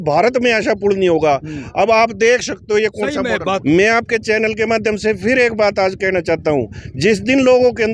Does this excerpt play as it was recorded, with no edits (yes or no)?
no